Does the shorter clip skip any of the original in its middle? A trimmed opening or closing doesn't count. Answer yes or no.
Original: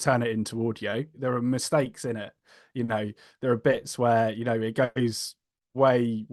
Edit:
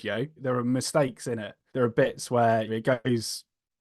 yes